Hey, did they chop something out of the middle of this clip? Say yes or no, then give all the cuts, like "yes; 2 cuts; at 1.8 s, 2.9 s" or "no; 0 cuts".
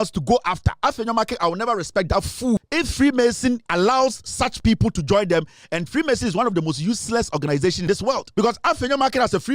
yes; 3 cuts; at 2.6 s, 3.6 s, 7.8 s